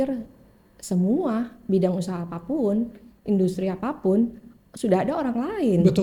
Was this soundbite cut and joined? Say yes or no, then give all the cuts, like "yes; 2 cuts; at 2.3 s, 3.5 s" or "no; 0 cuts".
no; 0 cuts